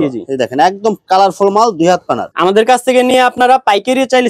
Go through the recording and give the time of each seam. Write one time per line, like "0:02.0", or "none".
none